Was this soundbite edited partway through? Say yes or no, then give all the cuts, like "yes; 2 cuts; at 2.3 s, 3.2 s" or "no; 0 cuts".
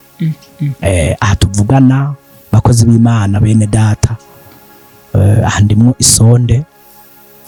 no; 0 cuts